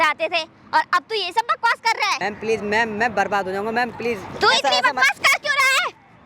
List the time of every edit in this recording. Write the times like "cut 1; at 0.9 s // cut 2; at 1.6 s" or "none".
cut 1; at 2.2 s